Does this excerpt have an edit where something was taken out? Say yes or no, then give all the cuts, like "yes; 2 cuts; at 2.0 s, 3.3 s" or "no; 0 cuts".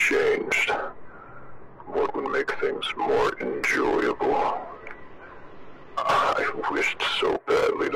no; 0 cuts